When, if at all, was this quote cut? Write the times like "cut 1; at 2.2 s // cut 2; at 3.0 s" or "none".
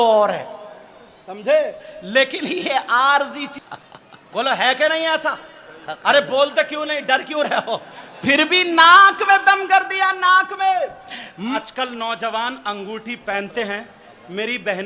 cut 1; at 3.6 s // cut 2; at 11.6 s